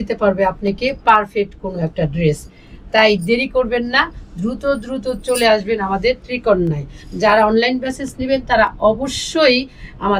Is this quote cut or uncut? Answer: uncut